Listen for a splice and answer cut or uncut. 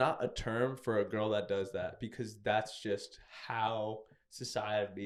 uncut